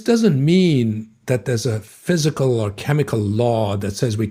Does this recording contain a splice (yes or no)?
no